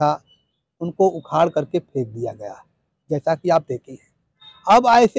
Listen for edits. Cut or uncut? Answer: uncut